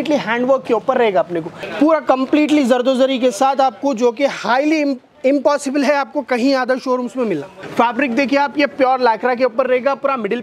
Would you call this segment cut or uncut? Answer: cut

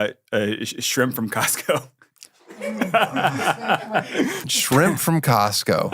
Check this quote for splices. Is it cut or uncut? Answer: cut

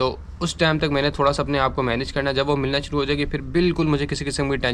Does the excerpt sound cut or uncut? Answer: uncut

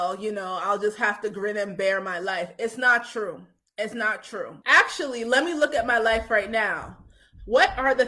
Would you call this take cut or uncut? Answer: cut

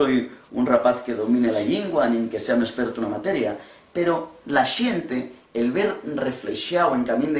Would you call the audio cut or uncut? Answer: uncut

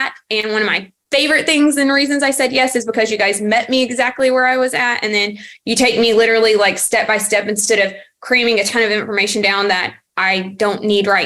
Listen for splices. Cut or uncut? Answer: uncut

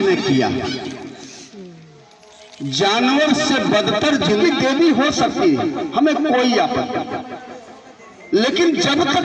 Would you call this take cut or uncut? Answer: cut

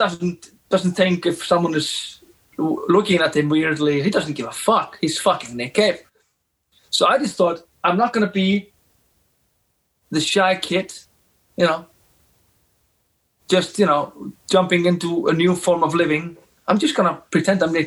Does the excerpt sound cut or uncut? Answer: uncut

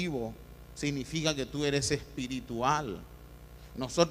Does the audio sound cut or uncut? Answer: cut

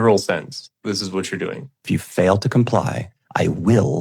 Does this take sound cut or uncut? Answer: cut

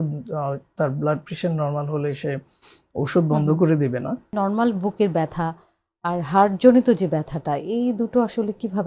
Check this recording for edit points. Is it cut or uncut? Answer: cut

